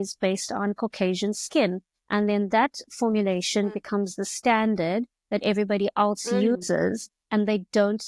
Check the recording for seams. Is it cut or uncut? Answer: uncut